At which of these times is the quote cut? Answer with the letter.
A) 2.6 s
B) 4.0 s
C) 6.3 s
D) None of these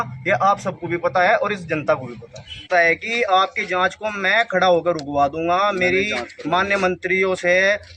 A